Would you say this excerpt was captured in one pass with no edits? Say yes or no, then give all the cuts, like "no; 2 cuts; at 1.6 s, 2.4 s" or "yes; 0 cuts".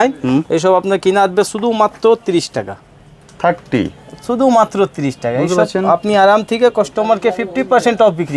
yes; 0 cuts